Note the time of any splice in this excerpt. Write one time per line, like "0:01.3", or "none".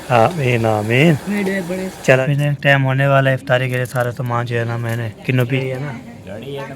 0:02.2
0:05.5